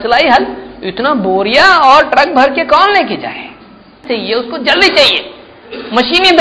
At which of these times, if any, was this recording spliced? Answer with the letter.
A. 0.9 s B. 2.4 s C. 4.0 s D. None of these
C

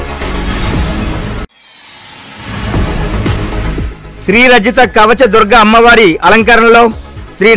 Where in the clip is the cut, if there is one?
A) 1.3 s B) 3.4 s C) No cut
A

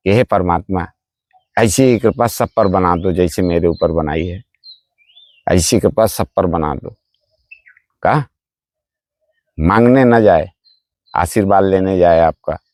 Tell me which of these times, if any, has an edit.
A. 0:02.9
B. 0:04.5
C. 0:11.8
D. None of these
D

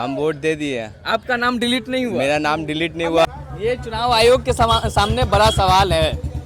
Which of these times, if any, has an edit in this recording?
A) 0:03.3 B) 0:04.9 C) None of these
A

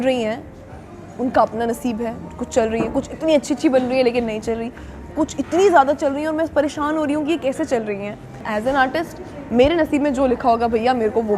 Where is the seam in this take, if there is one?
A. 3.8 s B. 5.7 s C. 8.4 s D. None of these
C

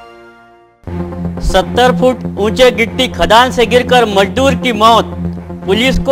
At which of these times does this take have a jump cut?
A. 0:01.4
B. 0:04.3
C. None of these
A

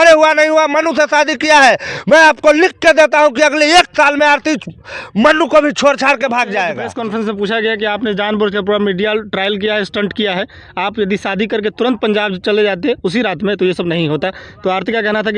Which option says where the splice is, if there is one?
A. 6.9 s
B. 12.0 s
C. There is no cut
A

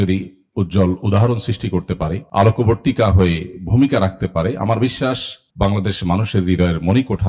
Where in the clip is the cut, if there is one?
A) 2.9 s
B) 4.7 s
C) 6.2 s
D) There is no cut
D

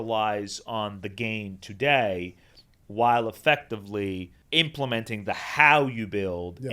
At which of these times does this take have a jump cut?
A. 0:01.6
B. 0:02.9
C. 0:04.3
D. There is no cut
C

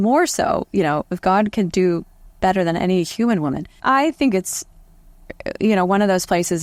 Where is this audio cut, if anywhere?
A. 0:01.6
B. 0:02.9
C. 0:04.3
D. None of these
D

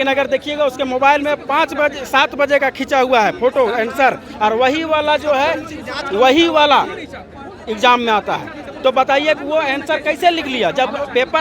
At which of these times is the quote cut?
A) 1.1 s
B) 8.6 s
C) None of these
C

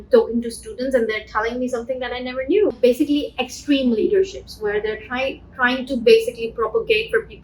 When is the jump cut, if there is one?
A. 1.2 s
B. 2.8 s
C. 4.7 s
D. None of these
B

